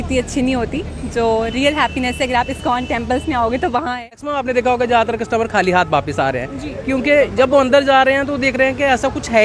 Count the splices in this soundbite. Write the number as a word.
one